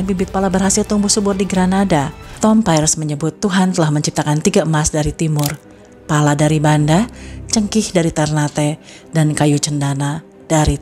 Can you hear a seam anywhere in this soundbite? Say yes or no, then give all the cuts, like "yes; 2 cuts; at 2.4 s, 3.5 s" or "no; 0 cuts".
yes; 1 cut; at 2.2 s